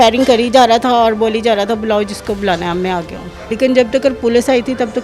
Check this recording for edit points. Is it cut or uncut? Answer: cut